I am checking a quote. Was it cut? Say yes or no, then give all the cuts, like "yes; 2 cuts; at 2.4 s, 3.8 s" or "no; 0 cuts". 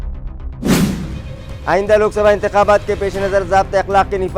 no; 0 cuts